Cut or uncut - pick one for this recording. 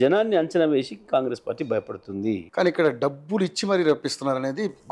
cut